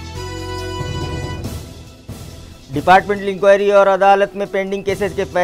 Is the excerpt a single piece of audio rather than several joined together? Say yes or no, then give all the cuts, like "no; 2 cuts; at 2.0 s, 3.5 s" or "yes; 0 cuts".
no; 1 cut; at 1.7 s